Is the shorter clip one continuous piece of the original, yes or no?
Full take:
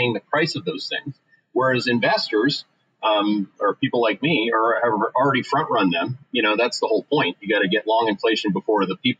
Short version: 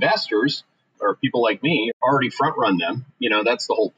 no